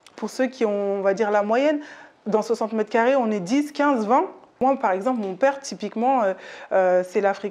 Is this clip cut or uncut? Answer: cut